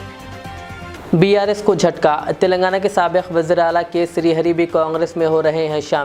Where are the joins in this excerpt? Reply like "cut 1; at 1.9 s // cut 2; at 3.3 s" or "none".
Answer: cut 1; at 0.9 s